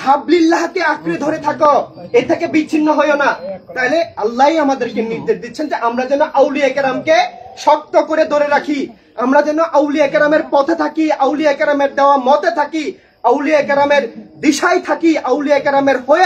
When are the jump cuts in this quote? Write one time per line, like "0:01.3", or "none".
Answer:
none